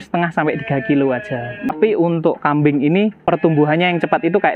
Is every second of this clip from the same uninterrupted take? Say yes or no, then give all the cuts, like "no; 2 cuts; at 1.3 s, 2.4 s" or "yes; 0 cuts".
no; 2 cuts; at 1.7 s, 3.2 s